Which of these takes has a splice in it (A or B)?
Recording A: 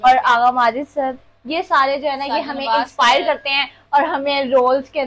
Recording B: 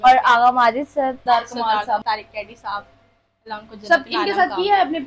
B